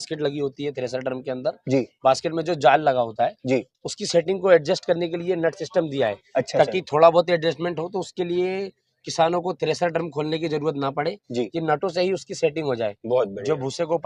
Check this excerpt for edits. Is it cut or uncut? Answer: uncut